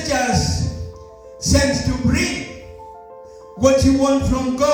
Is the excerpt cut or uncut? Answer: uncut